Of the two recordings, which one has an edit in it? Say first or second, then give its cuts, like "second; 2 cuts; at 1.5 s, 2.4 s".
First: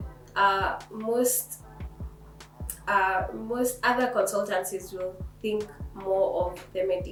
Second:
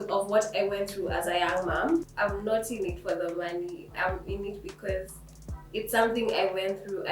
second; 1 cut; at 2.1 s